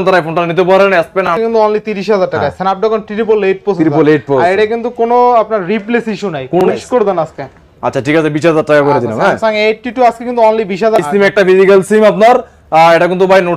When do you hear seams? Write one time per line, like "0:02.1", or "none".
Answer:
0:01.3
0:06.6
0:11.0

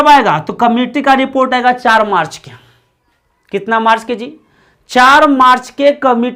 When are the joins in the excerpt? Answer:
none

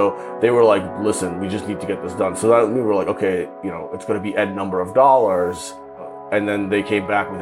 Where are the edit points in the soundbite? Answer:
0:06.1

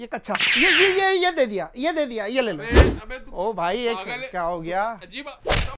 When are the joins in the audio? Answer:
none

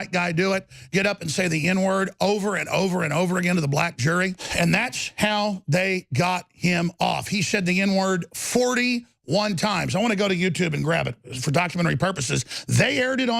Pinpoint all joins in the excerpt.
0:04.4

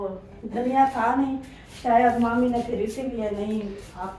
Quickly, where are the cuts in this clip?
none

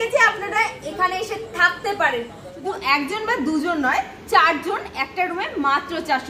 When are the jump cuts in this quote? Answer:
0:02.7

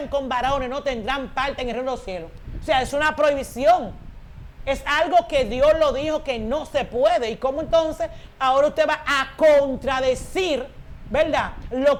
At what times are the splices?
none

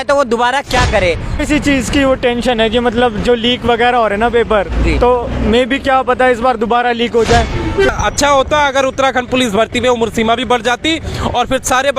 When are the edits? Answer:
0:01.4
0:07.9

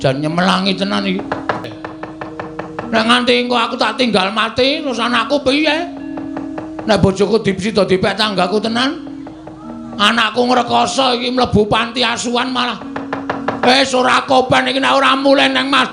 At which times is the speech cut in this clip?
0:01.6

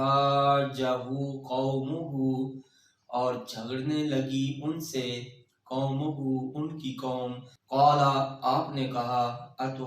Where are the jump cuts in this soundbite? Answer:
0:07.5

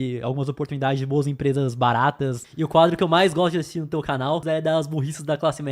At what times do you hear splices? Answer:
0:02.4
0:04.4

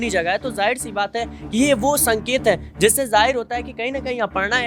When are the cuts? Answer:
none

